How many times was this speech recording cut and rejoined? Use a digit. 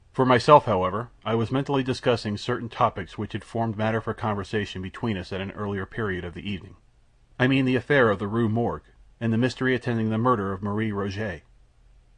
1